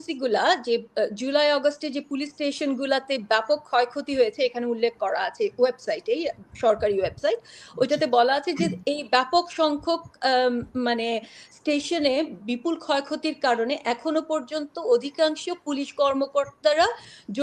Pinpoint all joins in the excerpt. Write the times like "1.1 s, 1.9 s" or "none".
none